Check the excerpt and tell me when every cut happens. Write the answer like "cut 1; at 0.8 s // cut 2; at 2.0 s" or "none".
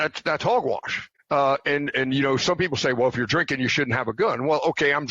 cut 1; at 1.1 s